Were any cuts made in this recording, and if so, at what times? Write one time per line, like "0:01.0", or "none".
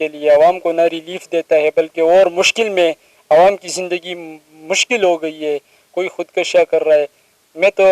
none